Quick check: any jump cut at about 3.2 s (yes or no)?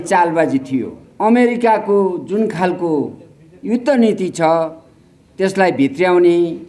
no